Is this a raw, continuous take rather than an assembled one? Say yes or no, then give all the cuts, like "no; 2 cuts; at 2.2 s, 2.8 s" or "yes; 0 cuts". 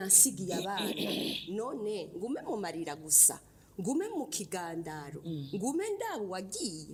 yes; 0 cuts